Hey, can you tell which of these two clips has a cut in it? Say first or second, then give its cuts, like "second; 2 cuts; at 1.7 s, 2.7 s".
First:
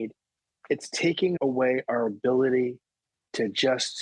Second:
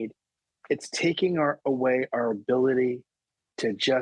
first; 1 cut; at 1.4 s